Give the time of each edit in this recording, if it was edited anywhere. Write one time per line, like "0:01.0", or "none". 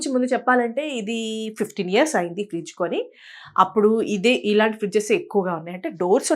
none